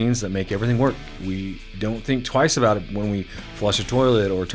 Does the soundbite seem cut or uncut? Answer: cut